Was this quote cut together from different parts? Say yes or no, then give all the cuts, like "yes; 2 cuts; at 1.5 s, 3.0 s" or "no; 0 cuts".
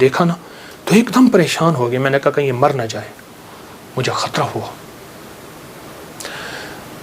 no; 0 cuts